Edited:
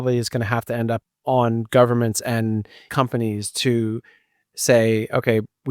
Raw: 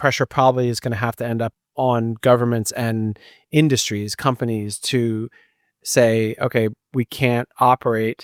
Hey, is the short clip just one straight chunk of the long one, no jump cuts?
no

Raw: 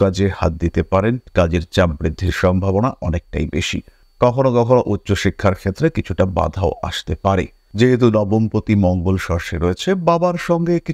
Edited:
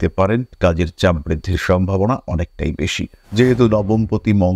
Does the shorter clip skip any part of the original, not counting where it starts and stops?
yes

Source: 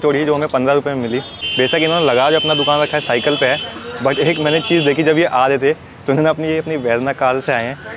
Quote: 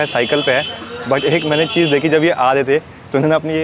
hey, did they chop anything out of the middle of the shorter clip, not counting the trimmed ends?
no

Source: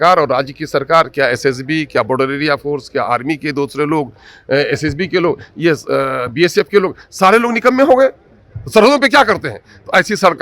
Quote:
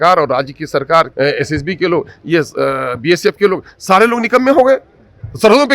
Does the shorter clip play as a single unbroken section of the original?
no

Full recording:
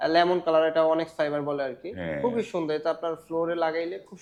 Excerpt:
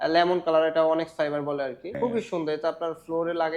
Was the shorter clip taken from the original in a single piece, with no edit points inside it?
no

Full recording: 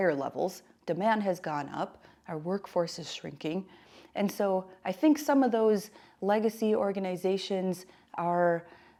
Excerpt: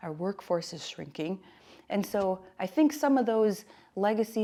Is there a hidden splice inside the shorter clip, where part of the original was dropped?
no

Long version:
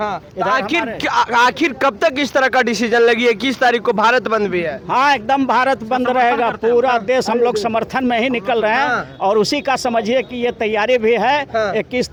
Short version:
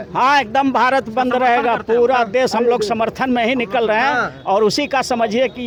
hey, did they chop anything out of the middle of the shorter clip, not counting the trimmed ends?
no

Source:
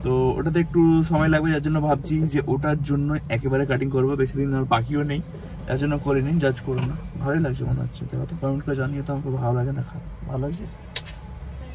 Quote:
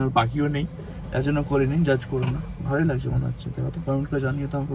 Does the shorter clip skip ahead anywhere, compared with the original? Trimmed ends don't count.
no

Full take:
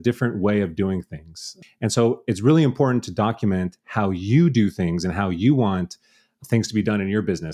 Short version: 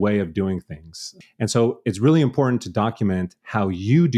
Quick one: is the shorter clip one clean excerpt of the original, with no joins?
yes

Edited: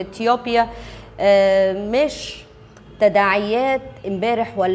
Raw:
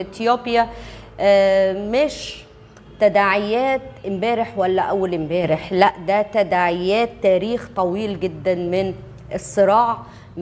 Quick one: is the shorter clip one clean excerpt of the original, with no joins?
yes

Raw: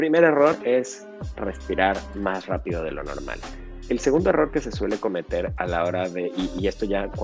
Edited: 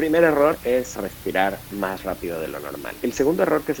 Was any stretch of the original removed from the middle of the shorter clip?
yes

